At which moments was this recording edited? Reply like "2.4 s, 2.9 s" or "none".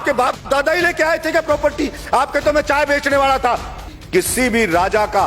3.9 s